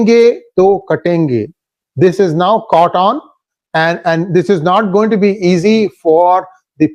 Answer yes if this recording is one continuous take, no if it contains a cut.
yes